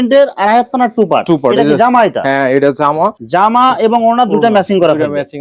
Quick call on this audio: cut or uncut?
cut